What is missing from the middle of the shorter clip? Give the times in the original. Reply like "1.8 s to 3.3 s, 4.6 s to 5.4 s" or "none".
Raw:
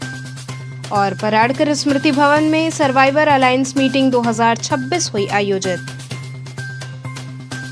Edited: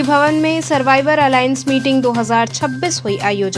none